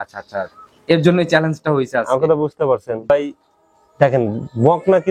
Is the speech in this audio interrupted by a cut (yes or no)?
yes